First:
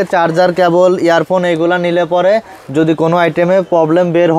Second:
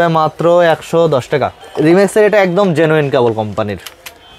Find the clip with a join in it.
second; 1 cut; at 1.6 s

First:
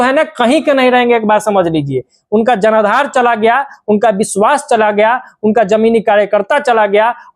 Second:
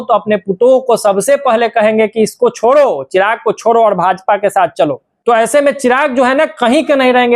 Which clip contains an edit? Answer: second; 1 cut; at 5.1 s

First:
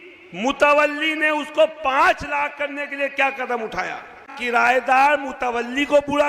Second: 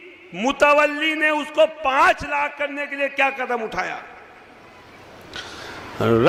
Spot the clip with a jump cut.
first; 1 cut; at 4.4 s

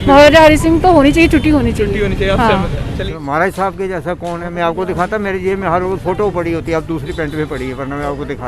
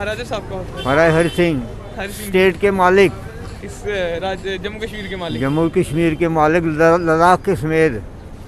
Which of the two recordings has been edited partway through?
first; 1 cut; at 3.0 s

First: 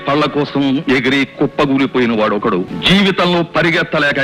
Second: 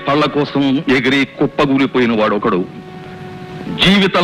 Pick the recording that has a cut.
first; 1 cut; at 2.7 s

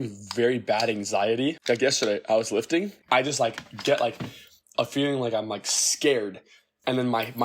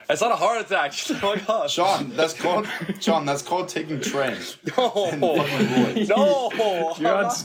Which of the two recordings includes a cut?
first; 2 cuts; at 1.6 s, 3.0 s

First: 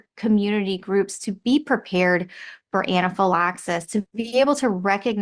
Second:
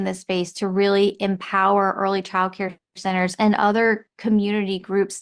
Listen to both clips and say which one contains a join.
first; 1 cut; at 4.2 s

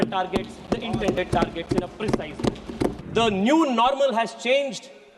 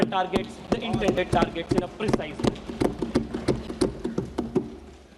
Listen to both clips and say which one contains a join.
first; 1 cut; at 3.0 s

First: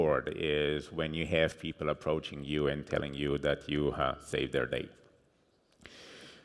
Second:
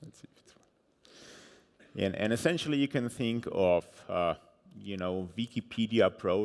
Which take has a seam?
first; 1 cut; at 2.3 s

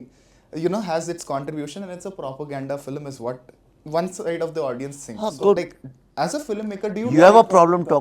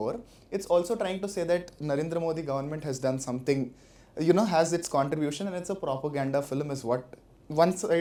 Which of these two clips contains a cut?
first; 1 cut; at 5.6 s

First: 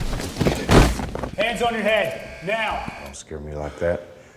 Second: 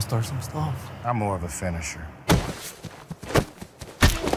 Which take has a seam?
first; 1 cut; at 1.2 s

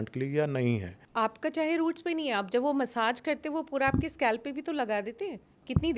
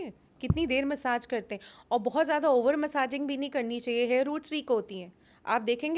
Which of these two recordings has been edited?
first; 1 cut; at 1.0 s

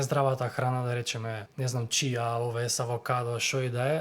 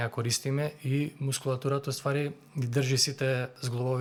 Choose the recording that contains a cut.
first; 1 cut; at 1.5 s

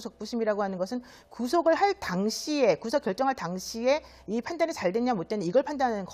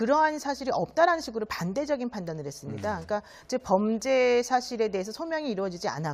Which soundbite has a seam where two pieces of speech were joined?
second; 1 cut; at 3.6 s

